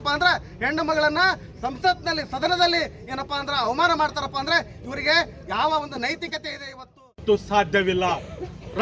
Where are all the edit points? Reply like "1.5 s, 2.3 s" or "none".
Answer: 7.2 s